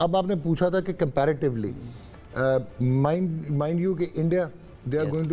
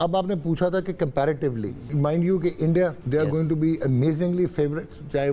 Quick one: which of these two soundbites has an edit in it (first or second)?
second